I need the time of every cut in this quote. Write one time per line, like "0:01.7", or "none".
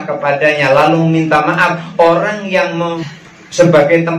0:03.0